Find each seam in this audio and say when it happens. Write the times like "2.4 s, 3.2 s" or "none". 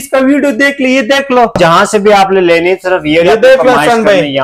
1.6 s